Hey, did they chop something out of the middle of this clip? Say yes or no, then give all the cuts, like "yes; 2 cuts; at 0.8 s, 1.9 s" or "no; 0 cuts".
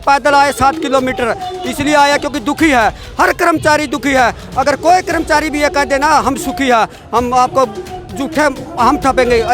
no; 0 cuts